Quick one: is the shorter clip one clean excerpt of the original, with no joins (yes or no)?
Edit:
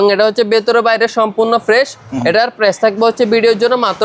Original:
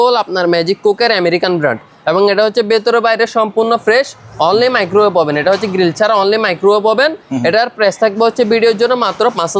no